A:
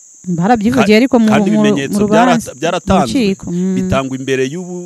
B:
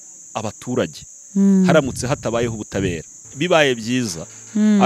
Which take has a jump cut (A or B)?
B